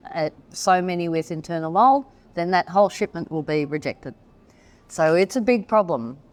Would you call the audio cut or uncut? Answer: uncut